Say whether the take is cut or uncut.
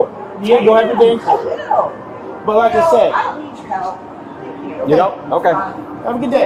uncut